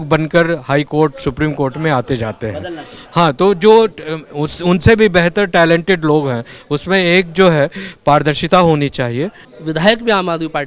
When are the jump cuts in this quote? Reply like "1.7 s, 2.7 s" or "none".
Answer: 9.5 s